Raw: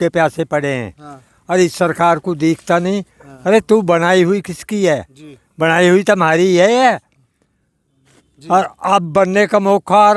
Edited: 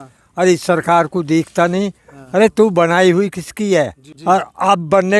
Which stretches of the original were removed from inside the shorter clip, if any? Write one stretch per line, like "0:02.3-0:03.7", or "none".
0:05.2-0:08.3